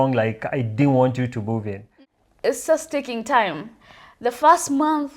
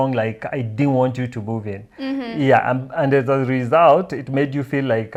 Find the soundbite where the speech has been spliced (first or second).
first